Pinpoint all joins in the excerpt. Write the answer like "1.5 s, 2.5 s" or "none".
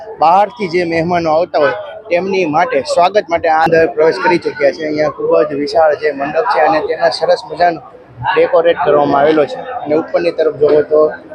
3.7 s